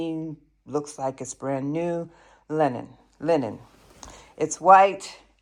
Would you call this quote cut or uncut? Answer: uncut